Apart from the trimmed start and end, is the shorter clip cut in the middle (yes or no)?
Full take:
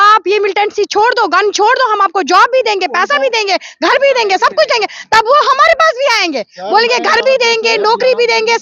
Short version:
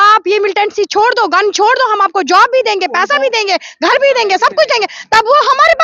no